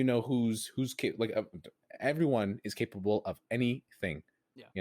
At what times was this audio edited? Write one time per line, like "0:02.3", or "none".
0:01.7